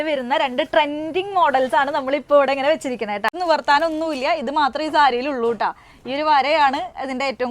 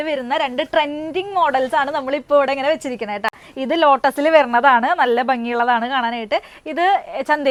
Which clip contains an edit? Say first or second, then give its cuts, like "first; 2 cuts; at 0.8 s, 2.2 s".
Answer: first; 1 cut; at 3.4 s